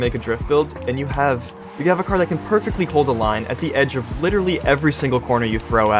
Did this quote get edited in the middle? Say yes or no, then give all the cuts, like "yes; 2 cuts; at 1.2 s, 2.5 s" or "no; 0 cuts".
no; 0 cuts